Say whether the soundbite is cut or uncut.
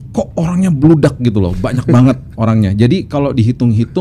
uncut